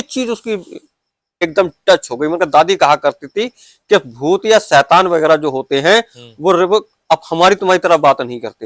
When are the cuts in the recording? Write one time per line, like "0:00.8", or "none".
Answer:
0:01.4

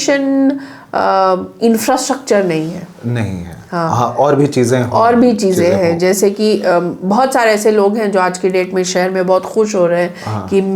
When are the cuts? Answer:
none

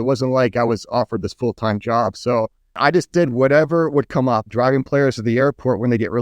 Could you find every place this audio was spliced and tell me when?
0:02.8
0:04.5

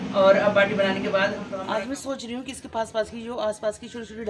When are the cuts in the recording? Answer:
0:01.5

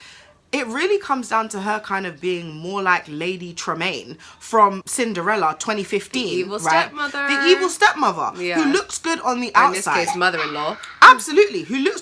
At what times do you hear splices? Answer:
0:04.8

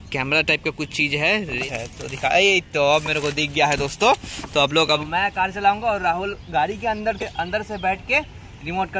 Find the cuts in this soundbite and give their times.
0:01.6
0:05.0

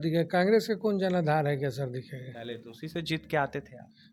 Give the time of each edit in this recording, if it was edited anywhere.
none

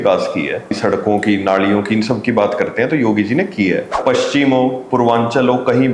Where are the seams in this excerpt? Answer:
0:00.8
0:04.0

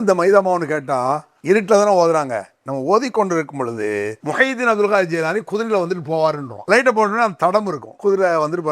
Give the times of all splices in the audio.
0:01.3
0:04.2
0:06.5
0:07.8

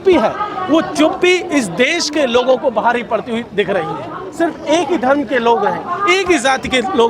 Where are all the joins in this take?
0:04.2

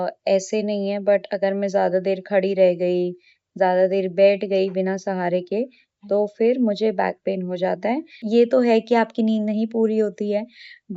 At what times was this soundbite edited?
0:08.2

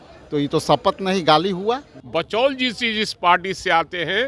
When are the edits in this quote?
0:01.9

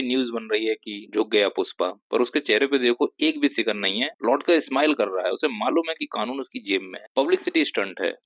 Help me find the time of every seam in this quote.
none

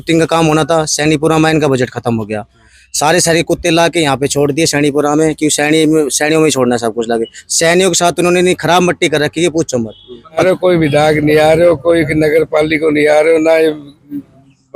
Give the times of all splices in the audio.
0:10.4

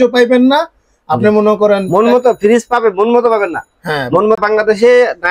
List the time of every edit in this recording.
0:04.4

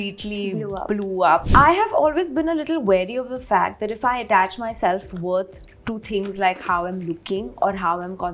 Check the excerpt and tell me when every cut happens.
0:01.5

